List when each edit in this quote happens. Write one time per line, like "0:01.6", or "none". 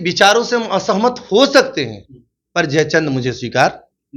none